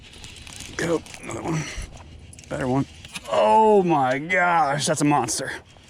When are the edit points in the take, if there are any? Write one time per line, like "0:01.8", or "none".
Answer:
none

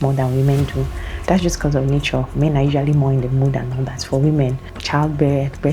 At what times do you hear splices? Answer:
0:04.7

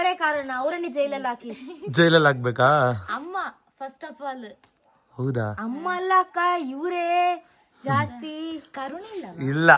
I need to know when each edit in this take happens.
none

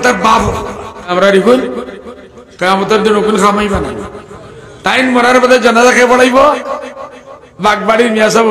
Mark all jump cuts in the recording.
0:01.1

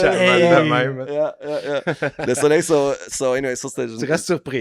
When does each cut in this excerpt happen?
none

